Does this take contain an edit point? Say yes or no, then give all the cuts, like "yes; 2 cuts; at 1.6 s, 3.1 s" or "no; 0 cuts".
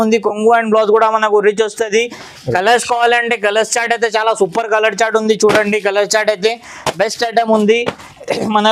no; 0 cuts